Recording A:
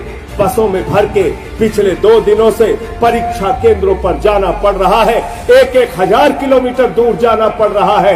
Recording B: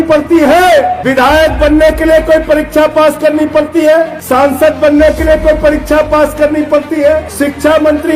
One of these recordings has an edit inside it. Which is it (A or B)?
B